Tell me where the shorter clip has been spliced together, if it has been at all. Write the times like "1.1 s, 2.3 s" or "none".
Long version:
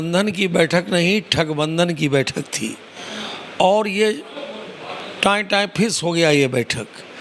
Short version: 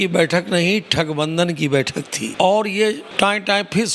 2.2 s, 3.1 s